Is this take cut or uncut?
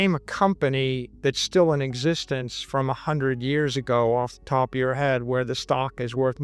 cut